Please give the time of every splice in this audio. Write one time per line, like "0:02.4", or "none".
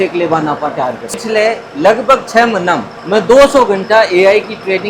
0:01.1